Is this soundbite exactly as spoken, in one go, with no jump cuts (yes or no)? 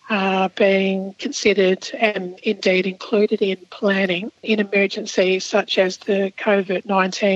no